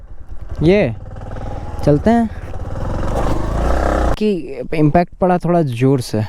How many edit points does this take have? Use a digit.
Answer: 2